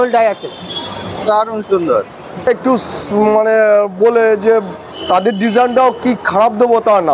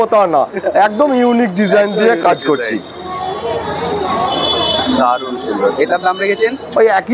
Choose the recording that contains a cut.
first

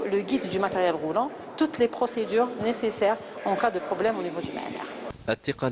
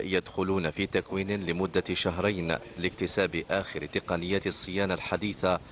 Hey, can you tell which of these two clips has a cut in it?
second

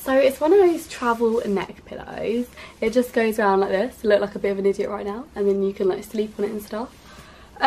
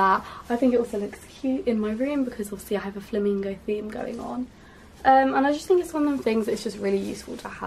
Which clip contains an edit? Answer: second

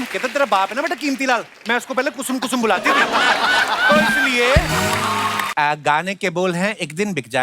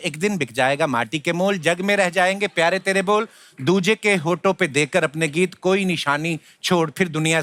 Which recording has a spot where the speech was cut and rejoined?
first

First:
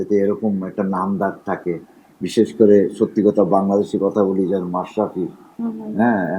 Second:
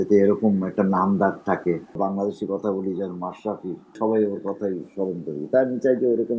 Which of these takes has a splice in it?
second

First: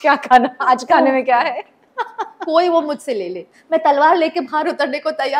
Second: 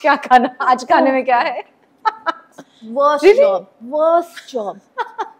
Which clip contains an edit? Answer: first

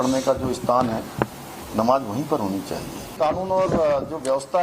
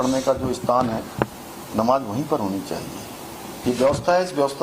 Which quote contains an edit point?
first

